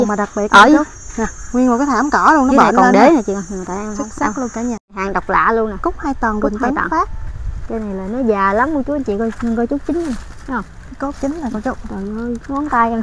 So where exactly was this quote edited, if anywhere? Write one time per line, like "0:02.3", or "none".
0:04.8